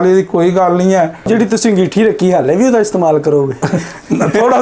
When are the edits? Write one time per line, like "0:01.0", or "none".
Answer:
0:01.3